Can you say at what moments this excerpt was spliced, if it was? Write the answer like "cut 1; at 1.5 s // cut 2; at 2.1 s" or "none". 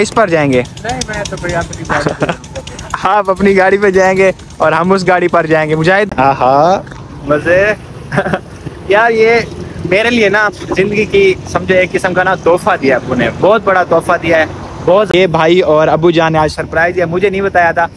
cut 1; at 6.1 s // cut 2; at 15.1 s

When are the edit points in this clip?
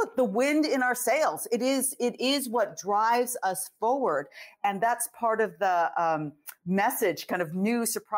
none

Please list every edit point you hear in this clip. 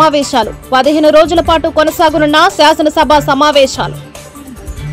cut 1; at 3.9 s

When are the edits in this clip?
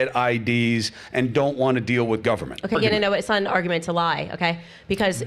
cut 1; at 2.8 s

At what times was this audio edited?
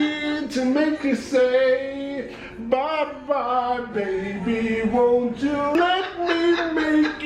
cut 1; at 5.8 s

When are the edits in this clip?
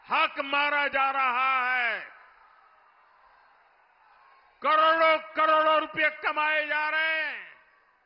none

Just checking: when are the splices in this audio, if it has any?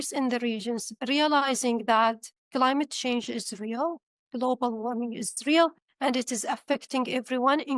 none

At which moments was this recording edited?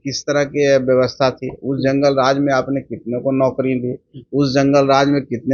none

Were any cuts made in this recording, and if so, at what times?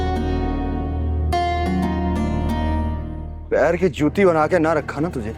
none

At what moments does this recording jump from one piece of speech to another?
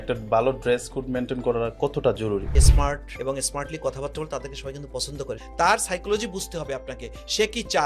cut 1; at 2.6 s // cut 2; at 5.5 s

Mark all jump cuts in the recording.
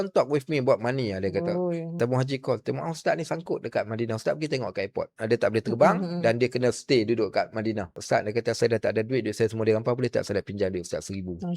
cut 1; at 2.0 s // cut 2; at 5.2 s // cut 3; at 8.0 s

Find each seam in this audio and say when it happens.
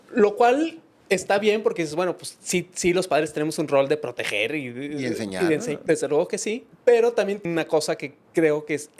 cut 1; at 5.8 s // cut 2; at 6.7 s // cut 3; at 7.4 s

